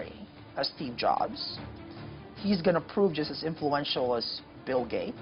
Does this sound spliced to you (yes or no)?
no